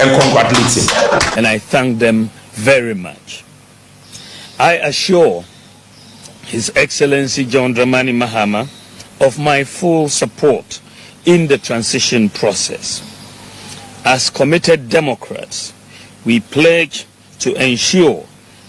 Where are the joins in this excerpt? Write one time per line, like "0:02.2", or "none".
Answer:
0:01.3